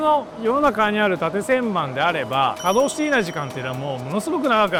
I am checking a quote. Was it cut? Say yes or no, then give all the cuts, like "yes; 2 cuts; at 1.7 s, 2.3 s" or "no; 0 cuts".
no; 0 cuts